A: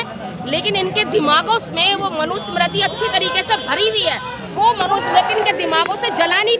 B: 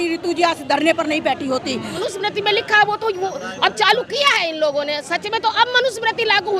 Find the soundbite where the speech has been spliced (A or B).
B